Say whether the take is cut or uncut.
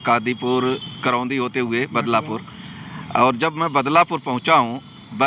uncut